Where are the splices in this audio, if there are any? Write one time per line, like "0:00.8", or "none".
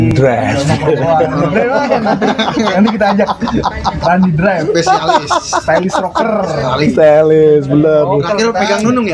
none